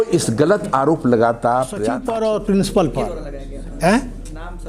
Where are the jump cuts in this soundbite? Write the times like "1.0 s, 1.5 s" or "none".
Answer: 2.0 s